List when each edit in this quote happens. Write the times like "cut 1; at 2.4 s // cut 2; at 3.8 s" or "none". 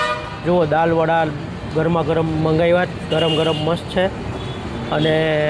none

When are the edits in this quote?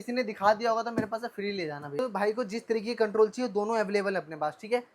cut 1; at 2.0 s

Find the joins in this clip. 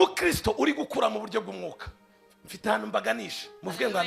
none

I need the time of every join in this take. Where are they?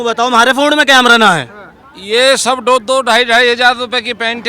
cut 1; at 1.9 s

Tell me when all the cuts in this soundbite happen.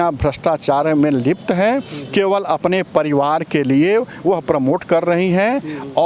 none

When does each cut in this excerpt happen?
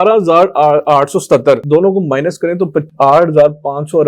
none

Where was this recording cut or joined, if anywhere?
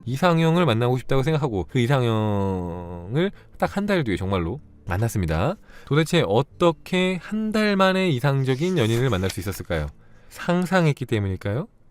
cut 1; at 1.7 s

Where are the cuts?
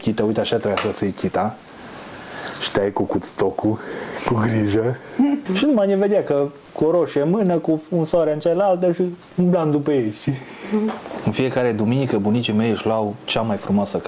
cut 1; at 5.5 s // cut 2; at 11.1 s

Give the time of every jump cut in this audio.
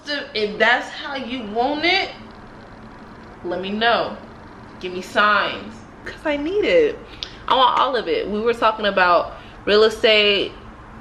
cut 1; at 3.1 s // cut 2; at 6.1 s

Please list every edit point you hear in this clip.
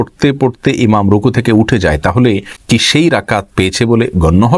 cut 1; at 2.5 s

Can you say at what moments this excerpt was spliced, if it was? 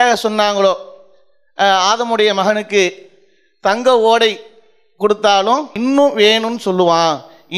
cut 1; at 5.7 s

